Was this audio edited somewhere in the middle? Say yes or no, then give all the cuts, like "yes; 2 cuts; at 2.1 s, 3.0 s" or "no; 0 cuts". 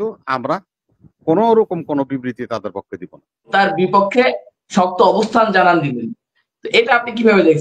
yes; 1 cut; at 3.5 s